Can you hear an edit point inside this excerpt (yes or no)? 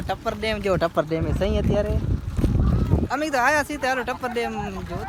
no